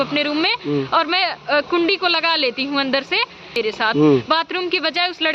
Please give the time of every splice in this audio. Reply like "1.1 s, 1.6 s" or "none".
3.6 s